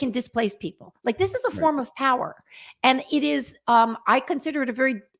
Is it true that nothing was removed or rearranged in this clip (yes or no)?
yes